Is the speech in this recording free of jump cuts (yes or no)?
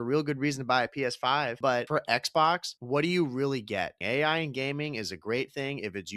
no